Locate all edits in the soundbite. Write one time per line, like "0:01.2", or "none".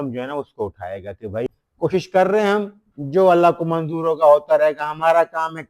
0:01.6